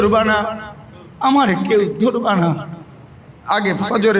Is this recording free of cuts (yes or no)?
yes